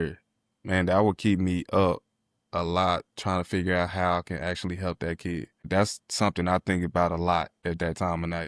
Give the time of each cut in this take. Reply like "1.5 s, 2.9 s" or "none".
5.7 s, 7.5 s

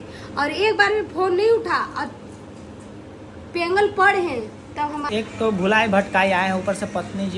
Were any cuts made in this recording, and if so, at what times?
5.1 s

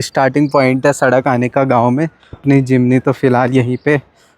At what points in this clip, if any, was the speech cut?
2.4 s

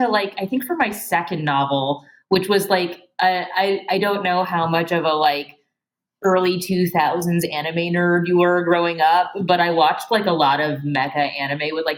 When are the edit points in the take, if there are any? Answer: none

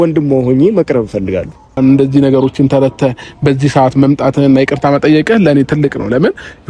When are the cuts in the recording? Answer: 1.8 s

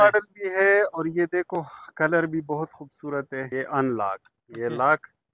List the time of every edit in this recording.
3.5 s

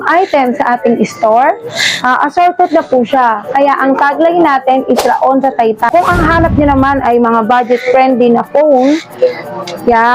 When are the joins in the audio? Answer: 5.9 s

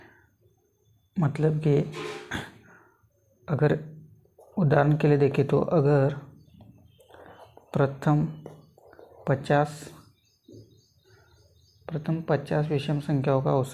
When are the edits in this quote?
none

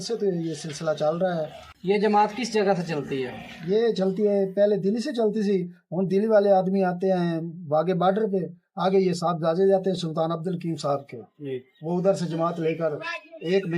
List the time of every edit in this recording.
1.6 s

